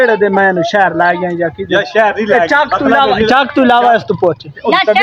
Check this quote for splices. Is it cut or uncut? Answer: uncut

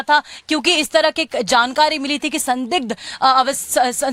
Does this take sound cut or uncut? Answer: uncut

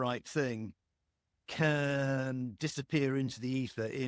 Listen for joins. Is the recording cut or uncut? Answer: uncut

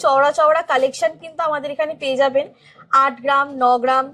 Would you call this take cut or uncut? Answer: uncut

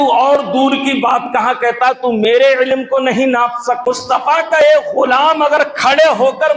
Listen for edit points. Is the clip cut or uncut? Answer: cut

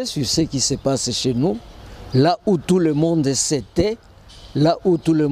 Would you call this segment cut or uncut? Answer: uncut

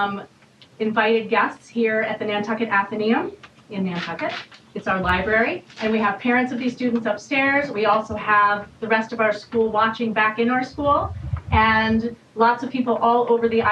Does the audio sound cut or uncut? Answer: uncut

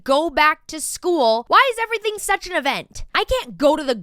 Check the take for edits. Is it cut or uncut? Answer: cut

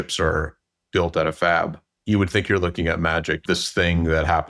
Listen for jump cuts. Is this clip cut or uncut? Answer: cut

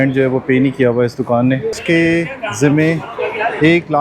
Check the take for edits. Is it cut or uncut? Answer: cut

